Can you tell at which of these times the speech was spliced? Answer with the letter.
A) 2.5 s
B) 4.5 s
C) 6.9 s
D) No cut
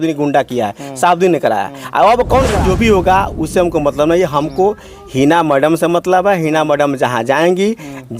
A